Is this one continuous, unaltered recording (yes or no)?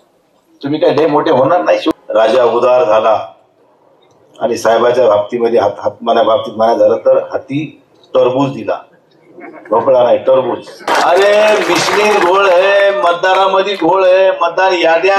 no